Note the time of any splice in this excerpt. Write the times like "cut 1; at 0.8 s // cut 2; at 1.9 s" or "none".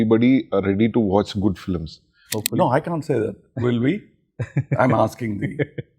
cut 1; at 2.3 s